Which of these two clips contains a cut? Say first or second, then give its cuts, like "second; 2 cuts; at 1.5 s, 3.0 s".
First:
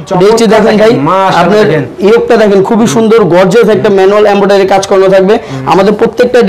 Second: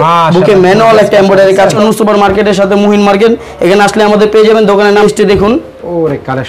second; 2 cuts; at 1.8 s, 5.0 s